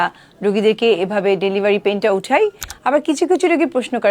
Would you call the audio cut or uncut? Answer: cut